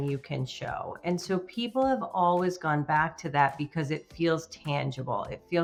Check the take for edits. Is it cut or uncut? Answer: uncut